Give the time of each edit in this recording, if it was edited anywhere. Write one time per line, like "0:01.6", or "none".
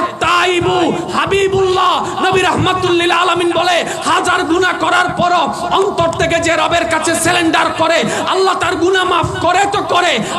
none